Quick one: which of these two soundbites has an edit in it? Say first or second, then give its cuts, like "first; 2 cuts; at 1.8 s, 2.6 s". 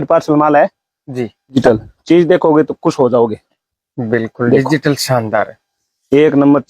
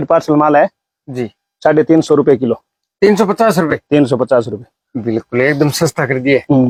first; 1 cut; at 1.5 s